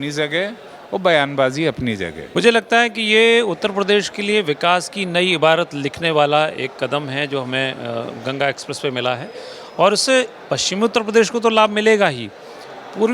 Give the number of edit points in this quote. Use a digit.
1